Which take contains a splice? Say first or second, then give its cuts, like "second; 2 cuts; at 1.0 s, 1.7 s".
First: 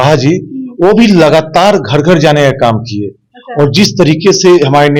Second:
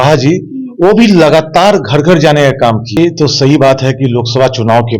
second; 1 cut; at 3.0 s